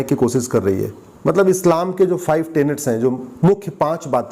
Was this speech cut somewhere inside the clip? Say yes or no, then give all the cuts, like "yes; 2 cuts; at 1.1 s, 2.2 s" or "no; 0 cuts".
yes; 1 cut; at 1.0 s